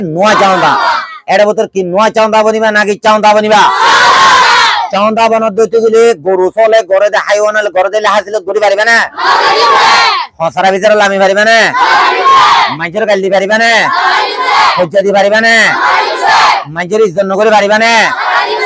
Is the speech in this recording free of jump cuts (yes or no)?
yes